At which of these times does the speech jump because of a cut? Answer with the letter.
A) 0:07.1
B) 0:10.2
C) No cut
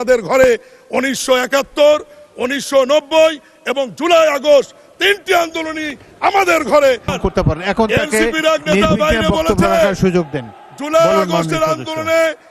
A